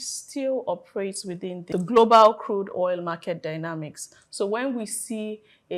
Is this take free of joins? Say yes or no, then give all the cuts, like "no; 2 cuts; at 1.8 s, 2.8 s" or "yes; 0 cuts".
no; 1 cut; at 1.6 s